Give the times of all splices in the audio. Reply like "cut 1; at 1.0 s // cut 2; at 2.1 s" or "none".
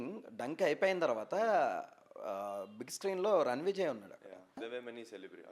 cut 1; at 4.6 s